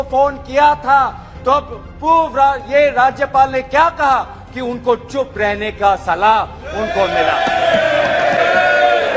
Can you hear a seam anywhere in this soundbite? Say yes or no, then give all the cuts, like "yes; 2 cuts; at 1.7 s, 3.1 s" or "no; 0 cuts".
no; 0 cuts